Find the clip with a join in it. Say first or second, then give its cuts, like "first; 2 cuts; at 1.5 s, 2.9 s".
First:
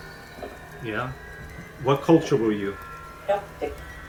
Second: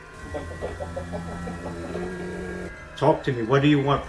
second; 1 cut; at 2.7 s